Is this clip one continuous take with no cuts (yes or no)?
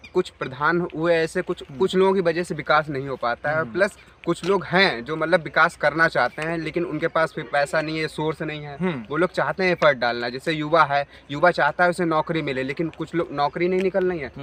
yes